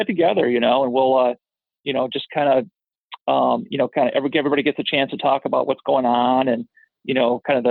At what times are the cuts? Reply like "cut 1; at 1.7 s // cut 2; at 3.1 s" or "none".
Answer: none